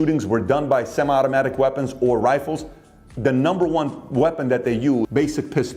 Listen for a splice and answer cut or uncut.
uncut